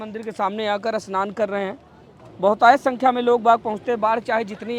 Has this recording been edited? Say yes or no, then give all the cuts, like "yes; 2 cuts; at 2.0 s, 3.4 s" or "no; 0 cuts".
no; 0 cuts